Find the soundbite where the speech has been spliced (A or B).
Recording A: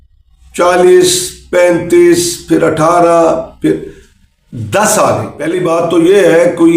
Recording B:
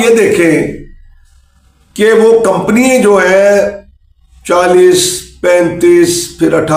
A